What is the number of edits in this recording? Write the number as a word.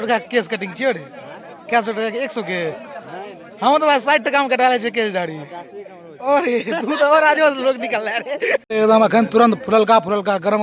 one